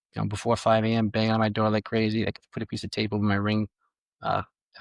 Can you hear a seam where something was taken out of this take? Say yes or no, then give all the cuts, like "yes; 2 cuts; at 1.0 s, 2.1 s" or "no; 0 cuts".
no; 0 cuts